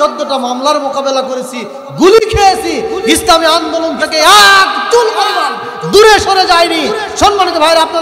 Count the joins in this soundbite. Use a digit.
0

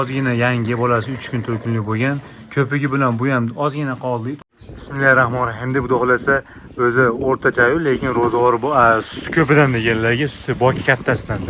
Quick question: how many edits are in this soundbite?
1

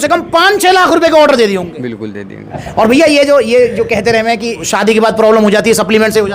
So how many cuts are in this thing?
2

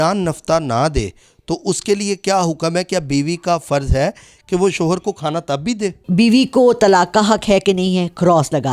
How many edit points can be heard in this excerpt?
1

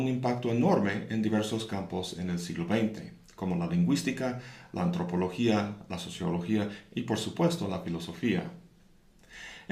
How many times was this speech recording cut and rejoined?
1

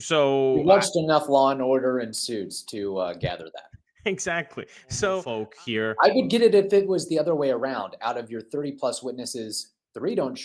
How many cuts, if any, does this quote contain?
1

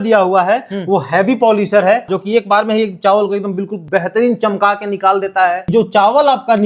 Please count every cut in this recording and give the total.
3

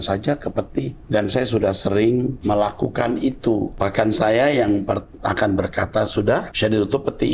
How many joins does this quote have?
4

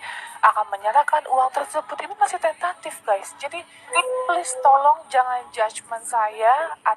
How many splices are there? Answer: 0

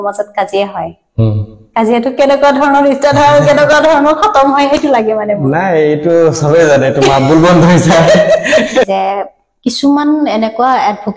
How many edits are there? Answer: 1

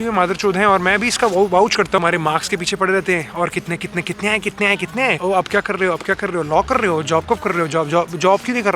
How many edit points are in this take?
2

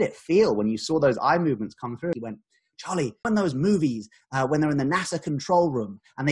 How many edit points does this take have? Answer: 1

